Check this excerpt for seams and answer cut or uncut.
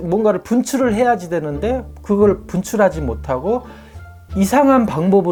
uncut